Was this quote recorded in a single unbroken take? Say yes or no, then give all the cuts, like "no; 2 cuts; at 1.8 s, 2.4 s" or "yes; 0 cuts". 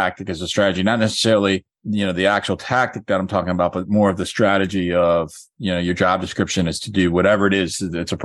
yes; 0 cuts